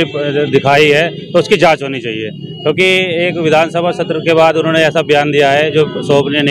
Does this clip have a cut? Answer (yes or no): no